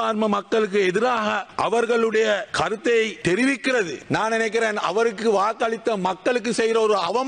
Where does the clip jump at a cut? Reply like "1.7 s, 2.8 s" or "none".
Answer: 1.5 s, 2.5 s, 3.6 s